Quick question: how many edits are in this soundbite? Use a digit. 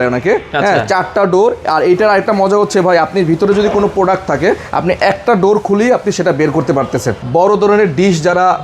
1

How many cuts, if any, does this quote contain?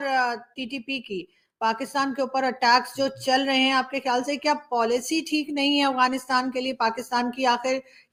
0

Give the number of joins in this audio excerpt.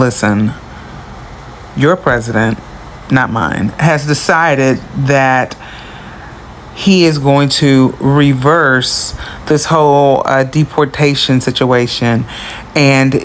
0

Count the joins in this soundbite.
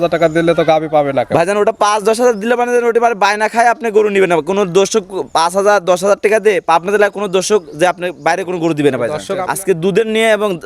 1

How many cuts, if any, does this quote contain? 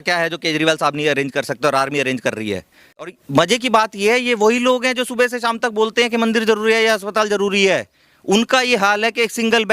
1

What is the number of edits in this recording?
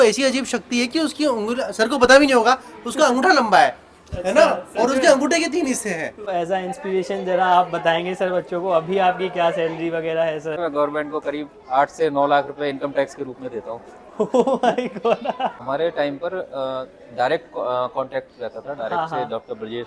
3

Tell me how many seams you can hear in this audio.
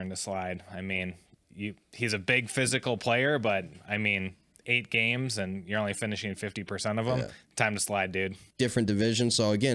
1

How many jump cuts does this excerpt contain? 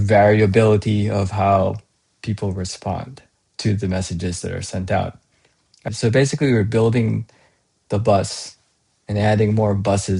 1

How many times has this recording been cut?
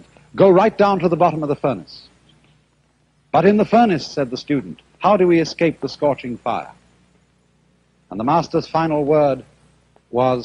1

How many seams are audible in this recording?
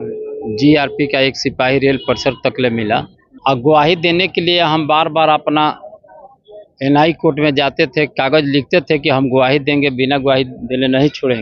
1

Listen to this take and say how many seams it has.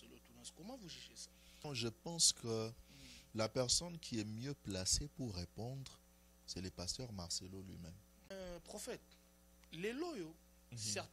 2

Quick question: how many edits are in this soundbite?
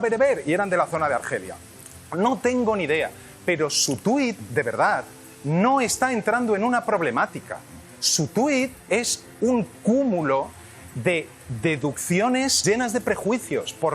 1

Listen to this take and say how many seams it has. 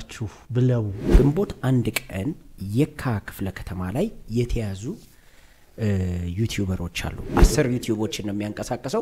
2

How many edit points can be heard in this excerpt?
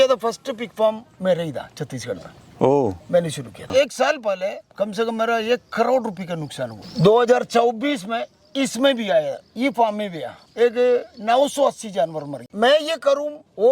2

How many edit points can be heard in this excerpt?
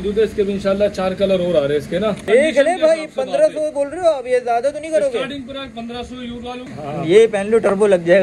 2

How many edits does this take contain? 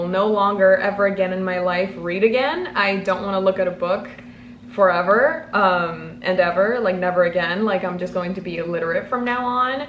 0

